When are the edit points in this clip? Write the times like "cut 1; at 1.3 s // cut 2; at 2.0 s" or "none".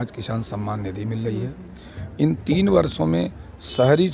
none

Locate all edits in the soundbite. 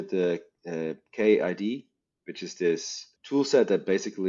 none

